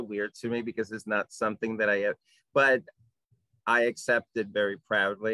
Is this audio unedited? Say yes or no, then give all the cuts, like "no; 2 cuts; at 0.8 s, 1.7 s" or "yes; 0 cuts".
yes; 0 cuts